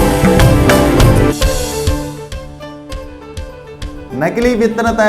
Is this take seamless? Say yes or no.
yes